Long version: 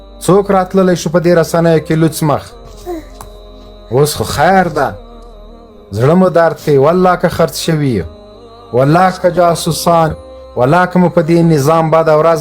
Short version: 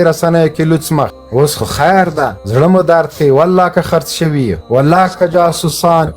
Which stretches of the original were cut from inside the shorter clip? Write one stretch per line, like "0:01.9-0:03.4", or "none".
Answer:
0:02.5-0:03.8
0:05.0-0:05.9
0:08.1-0:08.6